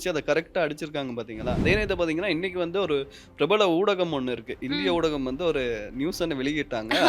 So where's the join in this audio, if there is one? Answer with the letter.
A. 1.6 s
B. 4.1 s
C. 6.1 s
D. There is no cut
A